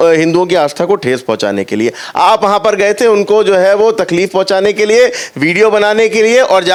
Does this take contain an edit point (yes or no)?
no